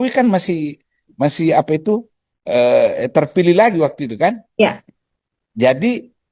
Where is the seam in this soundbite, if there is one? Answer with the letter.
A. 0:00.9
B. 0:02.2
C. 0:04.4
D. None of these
D